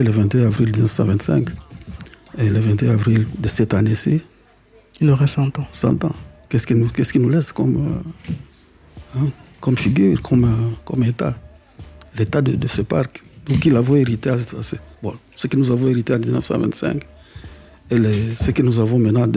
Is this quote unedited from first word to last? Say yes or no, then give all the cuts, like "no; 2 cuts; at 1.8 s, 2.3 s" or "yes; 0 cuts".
yes; 0 cuts